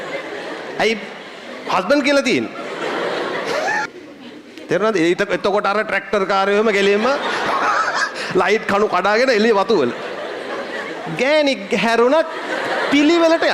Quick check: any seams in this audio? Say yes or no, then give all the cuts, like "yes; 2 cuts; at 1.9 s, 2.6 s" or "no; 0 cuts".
yes; 1 cut; at 3.9 s